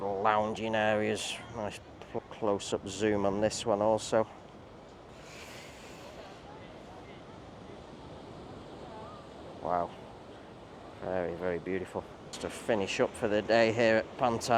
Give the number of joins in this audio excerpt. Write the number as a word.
two